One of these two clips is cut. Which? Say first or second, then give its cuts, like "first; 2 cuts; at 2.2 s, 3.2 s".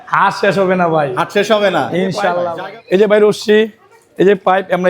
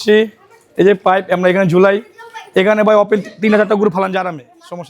first; 1 cut; at 2.4 s